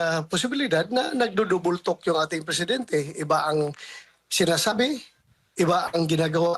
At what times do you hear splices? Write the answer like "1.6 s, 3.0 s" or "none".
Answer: 3.2 s

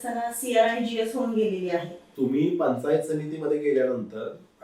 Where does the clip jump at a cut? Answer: 2.0 s

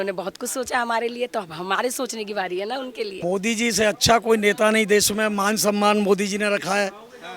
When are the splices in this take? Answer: 3.1 s

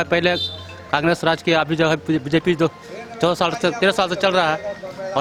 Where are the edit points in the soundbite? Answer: none

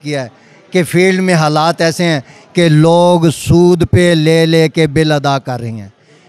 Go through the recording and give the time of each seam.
none

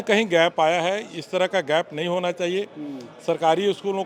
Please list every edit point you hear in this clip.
none

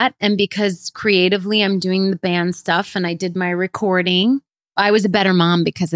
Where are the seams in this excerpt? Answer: none

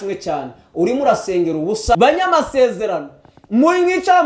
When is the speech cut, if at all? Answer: 2.0 s

